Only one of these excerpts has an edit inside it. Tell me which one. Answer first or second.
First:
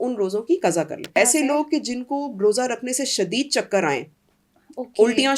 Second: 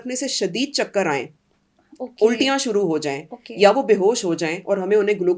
first